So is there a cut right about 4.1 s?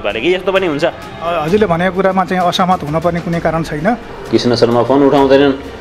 yes; 1 cut; at 4.1 s

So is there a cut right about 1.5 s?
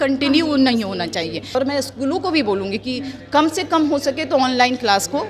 yes; 1 cut; at 1.5 s

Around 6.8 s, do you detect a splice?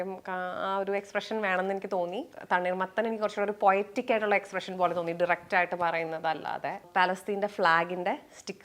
yes; 2 cuts; at 2.3 s, 6.8 s

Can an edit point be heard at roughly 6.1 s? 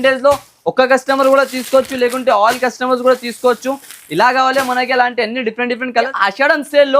yes; 1 cut; at 6.1 s

